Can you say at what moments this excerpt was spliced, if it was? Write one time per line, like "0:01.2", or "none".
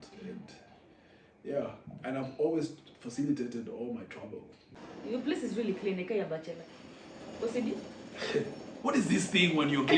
0:04.6